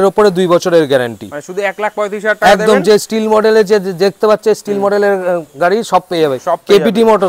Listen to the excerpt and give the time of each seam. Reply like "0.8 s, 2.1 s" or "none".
none

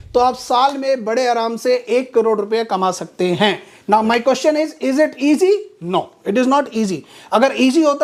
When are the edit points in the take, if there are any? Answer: none

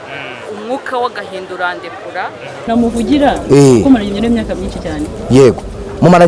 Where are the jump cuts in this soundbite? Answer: 2.7 s

